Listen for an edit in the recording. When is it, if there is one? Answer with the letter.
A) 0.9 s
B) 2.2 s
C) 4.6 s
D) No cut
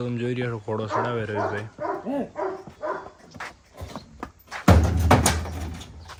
D